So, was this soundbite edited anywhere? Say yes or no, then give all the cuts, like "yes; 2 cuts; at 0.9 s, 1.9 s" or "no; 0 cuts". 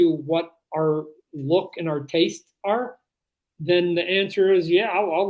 no; 0 cuts